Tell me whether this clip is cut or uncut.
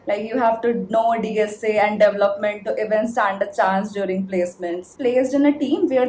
cut